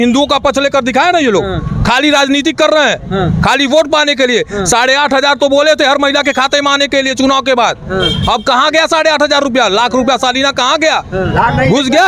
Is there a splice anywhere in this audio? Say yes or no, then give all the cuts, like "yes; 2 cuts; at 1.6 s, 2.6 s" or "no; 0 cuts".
no; 0 cuts